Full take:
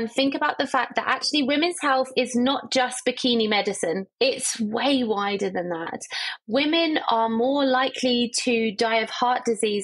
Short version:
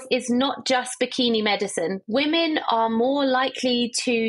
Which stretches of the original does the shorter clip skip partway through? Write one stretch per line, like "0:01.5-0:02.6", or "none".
0:04.1-0:06.4